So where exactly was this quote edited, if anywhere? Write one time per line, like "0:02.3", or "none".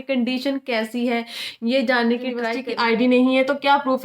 0:02.6